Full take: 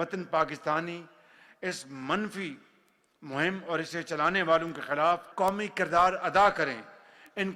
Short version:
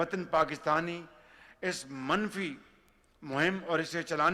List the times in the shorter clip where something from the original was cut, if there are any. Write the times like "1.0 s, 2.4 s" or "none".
none